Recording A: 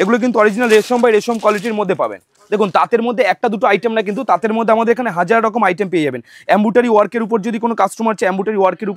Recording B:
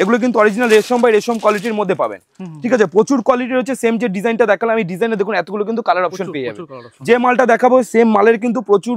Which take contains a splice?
A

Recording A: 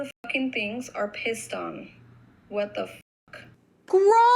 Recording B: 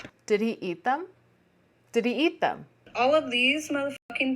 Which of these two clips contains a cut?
B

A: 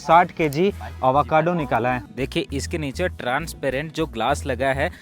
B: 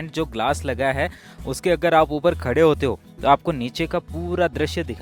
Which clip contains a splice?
A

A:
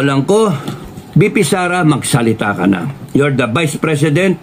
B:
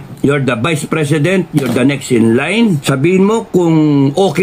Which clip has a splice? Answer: B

